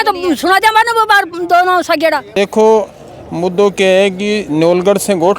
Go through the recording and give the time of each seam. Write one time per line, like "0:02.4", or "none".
0:02.3